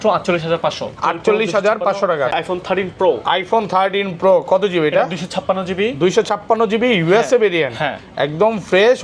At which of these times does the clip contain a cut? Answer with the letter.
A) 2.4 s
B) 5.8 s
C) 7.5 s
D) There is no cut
A